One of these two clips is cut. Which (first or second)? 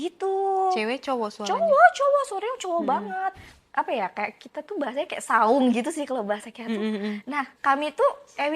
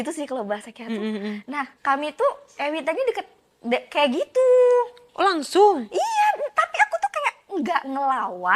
first